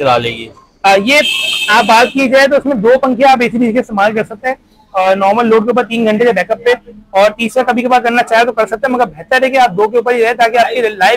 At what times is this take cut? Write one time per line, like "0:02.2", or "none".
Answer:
none